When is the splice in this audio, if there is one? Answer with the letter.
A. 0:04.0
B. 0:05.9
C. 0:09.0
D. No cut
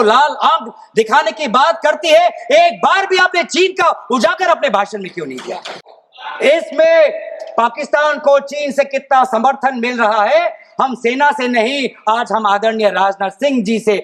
D